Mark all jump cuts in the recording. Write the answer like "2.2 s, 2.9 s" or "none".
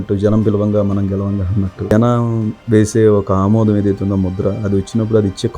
1.7 s